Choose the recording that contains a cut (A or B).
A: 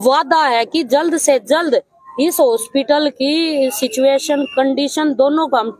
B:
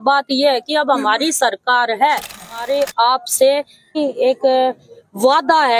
B